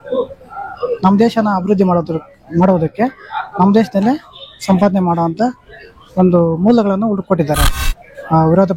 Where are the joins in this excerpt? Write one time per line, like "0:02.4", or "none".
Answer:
0:07.8